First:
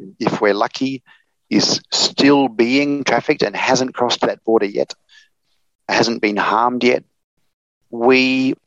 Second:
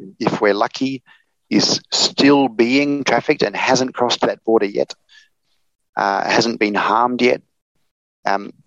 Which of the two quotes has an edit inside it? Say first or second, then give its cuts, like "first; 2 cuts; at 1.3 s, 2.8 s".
first; 2 cuts; at 5.9 s, 7.7 s